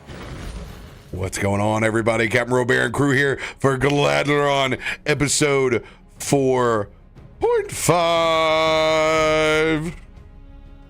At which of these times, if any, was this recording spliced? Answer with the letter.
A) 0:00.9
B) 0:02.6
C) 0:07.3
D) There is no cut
A